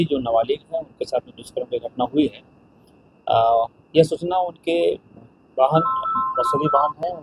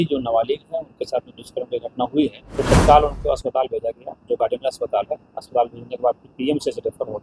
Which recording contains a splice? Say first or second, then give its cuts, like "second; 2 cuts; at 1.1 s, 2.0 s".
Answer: second; 1 cut; at 2.4 s